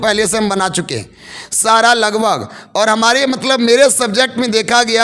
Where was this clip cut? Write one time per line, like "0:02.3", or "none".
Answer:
none

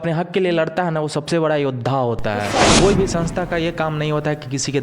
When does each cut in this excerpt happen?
0:02.6

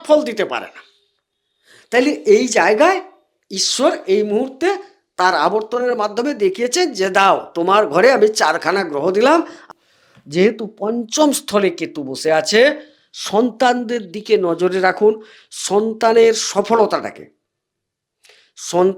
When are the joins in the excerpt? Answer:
0:09.6

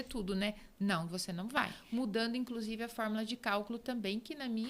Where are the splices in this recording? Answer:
0:01.8

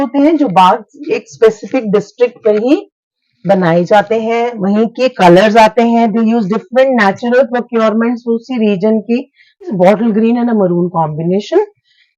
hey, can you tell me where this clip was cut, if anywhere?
0:09.7

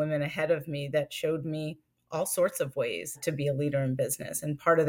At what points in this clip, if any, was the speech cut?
0:03.2

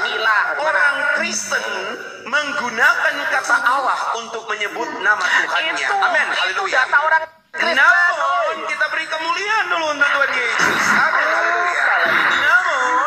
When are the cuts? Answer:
0:07.4

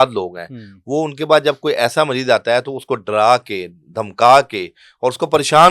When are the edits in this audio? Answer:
none

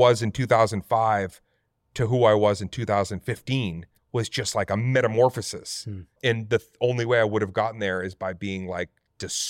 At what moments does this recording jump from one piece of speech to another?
0:03.9
0:06.1

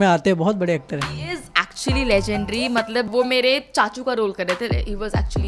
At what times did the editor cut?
0:03.1

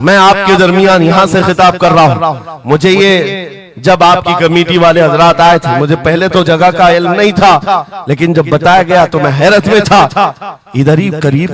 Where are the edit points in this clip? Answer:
none

